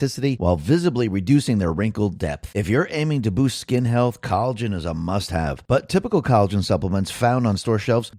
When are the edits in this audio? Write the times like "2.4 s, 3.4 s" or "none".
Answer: none